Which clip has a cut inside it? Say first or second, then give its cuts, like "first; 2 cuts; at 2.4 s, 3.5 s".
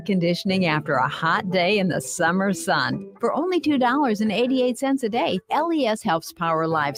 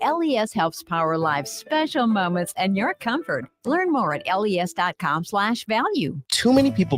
second; 1 cut; at 6.0 s